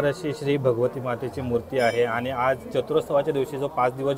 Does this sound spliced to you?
no; 0 cuts

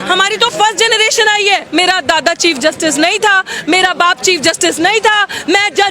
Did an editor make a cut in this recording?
yes; 1 cut; at 1.7 s

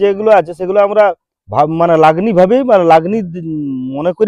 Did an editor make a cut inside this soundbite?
no; 0 cuts

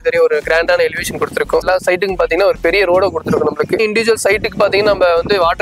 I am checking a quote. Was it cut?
yes; 2 cuts; at 1.7 s, 3.8 s

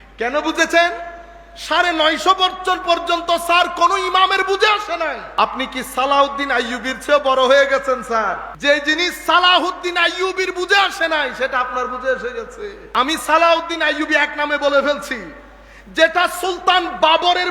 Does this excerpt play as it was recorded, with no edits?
no; 2 cuts; at 5.2 s, 8.5 s

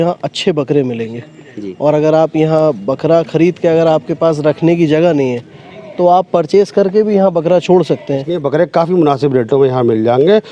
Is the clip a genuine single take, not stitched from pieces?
no; 1 cut; at 8.3 s

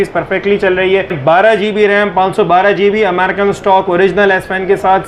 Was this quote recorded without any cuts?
no; 1 cut; at 1.2 s

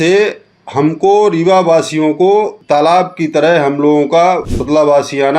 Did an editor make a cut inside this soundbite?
yes; 2 cuts; at 2.6 s, 4.5 s

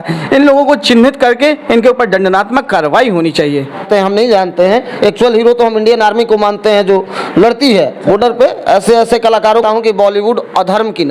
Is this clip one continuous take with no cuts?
no; 2 cuts; at 3.8 s, 9.6 s

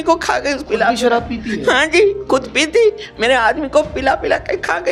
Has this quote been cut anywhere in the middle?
no; 0 cuts

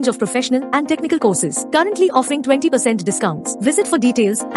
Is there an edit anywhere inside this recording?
no; 0 cuts

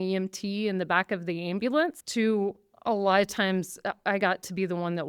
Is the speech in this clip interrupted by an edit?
yes; 1 cut; at 2.0 s

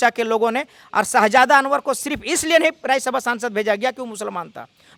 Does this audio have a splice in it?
no; 0 cuts

